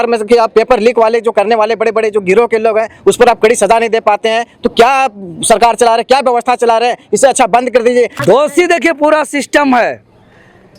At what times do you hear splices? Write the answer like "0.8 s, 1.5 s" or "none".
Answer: 8.2 s